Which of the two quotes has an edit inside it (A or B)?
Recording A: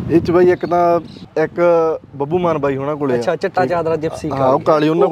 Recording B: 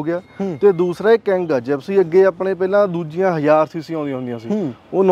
A